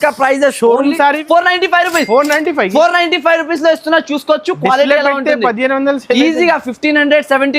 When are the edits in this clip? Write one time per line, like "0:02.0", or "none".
0:01.2